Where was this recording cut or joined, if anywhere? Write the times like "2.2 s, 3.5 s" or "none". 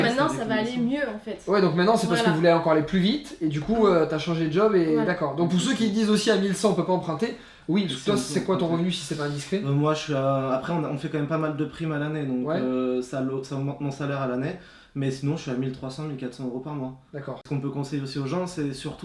17.4 s